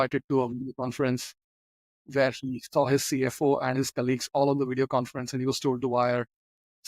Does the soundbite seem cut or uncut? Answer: uncut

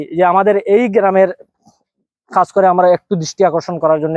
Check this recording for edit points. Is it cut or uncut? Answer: uncut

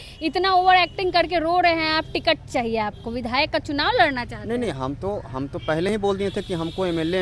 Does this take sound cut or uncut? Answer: uncut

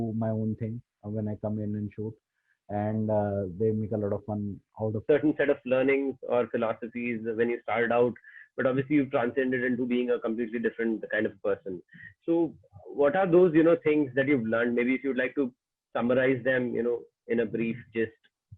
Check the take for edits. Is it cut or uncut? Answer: cut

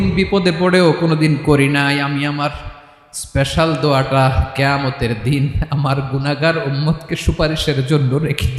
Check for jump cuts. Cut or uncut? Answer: uncut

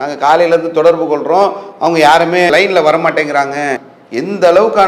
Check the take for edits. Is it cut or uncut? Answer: cut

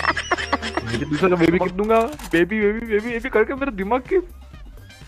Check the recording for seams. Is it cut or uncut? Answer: cut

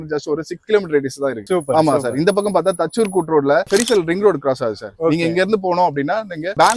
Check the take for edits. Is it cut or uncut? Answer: uncut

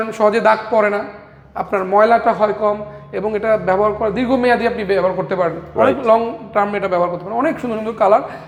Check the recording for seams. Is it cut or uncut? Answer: uncut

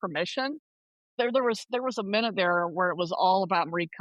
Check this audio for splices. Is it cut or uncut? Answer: cut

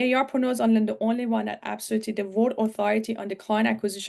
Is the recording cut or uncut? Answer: uncut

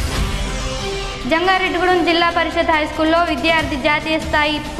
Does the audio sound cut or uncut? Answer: cut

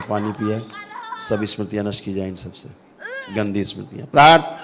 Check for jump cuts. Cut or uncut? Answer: uncut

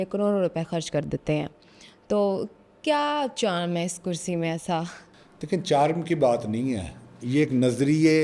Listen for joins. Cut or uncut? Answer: uncut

